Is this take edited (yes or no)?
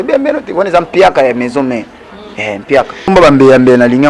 yes